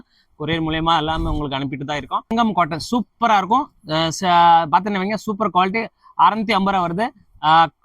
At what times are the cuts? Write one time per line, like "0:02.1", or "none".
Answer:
0:02.3